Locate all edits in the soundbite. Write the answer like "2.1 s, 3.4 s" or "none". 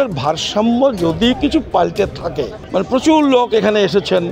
2.6 s